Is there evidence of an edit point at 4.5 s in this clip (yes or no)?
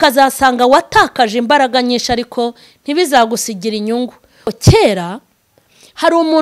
yes